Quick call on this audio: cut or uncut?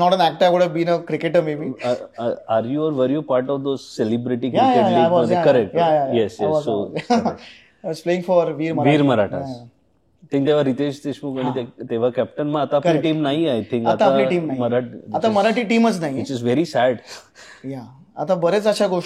uncut